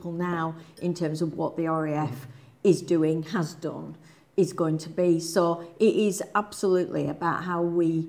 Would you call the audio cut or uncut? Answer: uncut